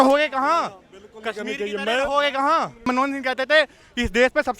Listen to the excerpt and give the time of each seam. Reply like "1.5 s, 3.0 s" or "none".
2.7 s